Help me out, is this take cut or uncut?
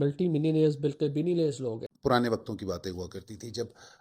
cut